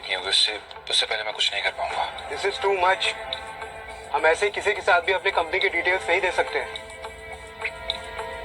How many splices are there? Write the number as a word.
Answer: zero